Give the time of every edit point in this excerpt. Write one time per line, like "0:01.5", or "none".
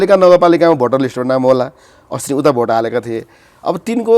none